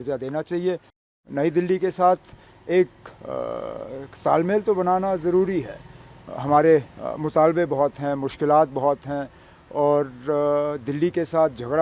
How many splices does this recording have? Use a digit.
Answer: 1